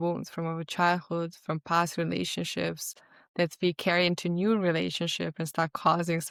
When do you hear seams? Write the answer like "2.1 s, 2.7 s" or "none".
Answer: none